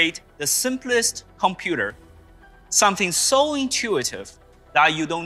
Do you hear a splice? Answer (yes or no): no